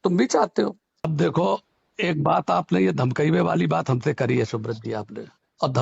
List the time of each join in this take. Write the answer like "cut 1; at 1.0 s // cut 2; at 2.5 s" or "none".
cut 1; at 1.1 s